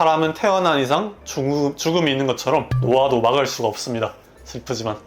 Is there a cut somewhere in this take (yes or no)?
no